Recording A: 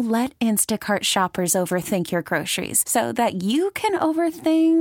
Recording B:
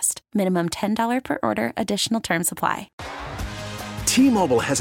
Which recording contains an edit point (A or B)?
B